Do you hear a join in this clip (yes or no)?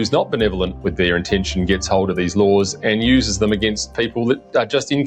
no